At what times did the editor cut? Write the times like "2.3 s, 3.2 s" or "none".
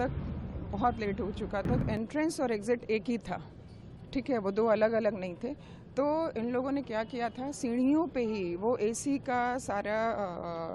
1.8 s